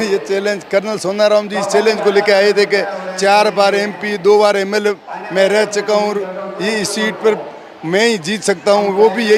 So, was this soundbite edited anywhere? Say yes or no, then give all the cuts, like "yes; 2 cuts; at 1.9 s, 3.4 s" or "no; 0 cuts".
no; 0 cuts